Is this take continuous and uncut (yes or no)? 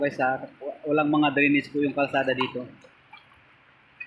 yes